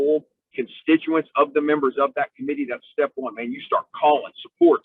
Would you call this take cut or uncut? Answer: uncut